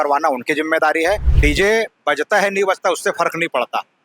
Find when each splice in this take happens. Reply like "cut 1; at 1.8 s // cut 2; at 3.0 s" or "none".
cut 1; at 1.3 s